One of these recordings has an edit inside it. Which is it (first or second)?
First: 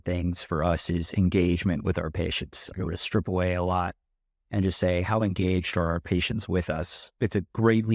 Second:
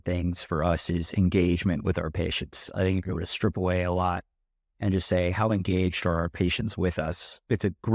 first